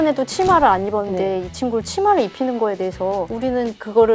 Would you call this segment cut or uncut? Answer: uncut